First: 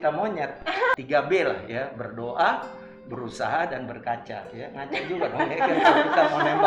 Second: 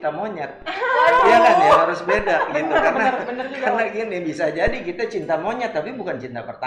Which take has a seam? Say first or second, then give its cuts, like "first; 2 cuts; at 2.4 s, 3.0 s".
first; 1 cut; at 0.9 s